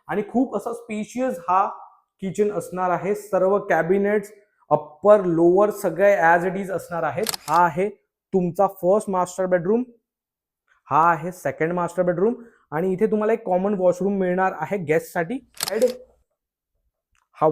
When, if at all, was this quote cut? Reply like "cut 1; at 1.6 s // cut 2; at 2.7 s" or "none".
cut 1; at 7.4 s // cut 2; at 15.7 s